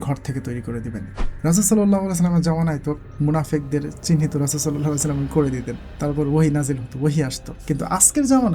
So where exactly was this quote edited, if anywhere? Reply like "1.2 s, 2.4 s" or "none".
1.2 s